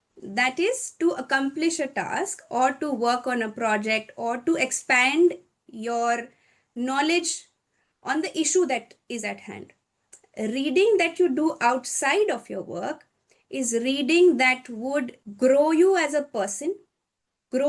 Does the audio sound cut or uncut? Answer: uncut